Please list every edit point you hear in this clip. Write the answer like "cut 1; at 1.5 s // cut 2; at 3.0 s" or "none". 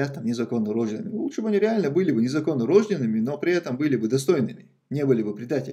none